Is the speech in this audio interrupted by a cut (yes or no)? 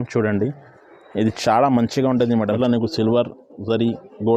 yes